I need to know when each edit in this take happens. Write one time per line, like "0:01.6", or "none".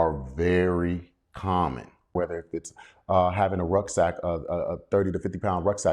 0:02.1